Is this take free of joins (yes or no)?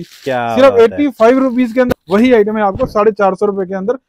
no